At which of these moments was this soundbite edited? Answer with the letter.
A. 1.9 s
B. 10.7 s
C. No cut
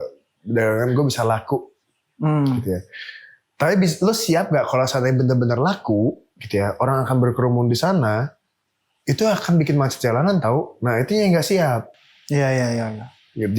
C